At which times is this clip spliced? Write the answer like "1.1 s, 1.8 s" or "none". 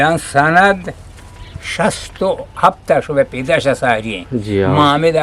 none

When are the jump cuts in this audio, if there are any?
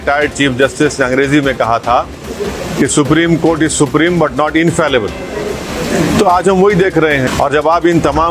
7.3 s

